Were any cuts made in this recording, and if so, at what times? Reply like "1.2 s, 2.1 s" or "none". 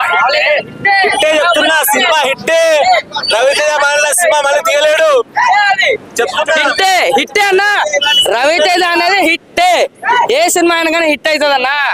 none